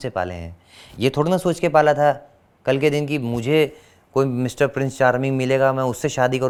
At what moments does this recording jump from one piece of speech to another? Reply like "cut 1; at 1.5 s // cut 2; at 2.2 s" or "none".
none